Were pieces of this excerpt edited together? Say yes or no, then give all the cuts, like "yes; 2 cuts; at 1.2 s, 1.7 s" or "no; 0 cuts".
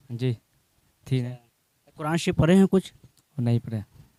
no; 0 cuts